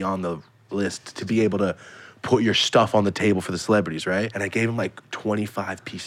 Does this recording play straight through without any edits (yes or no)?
no